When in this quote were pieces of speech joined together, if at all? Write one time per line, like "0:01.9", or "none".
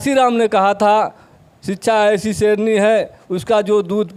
none